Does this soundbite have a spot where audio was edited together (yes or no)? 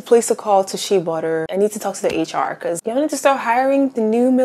yes